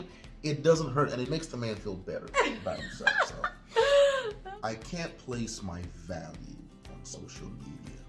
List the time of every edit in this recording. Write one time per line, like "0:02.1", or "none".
0:01.3
0:04.4